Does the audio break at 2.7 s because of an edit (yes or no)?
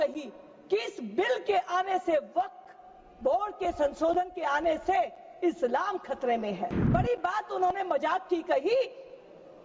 no